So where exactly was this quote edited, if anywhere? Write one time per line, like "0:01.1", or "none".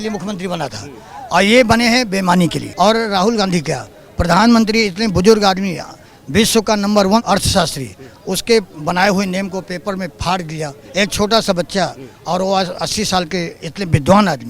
0:02.6
0:07.2
0:10.8